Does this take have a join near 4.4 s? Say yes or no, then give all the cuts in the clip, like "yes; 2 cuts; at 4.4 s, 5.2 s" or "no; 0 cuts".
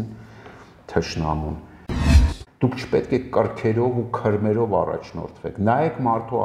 no; 1 cut; at 2.0 s